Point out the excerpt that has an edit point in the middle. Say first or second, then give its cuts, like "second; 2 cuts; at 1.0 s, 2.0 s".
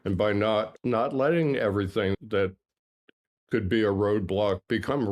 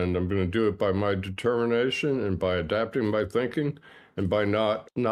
first; 1 cut; at 2.1 s